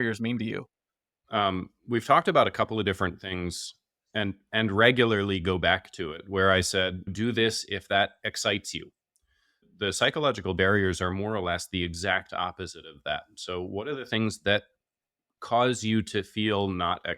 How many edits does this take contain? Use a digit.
1